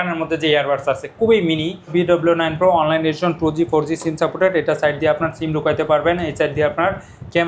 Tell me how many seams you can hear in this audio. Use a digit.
1